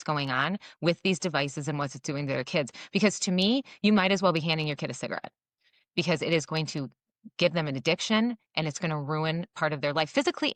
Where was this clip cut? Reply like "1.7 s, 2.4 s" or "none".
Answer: none